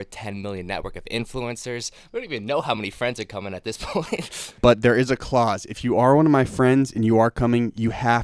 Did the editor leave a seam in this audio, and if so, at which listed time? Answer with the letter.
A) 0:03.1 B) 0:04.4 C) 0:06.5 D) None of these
B